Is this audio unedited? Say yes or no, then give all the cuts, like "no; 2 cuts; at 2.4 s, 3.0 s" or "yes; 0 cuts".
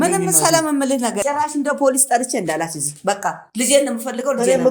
no; 1 cut; at 1.2 s